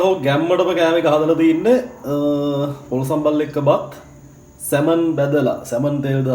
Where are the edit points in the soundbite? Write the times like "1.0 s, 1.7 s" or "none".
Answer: none